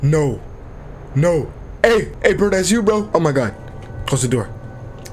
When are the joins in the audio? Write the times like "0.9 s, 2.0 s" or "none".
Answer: 2.1 s, 3.1 s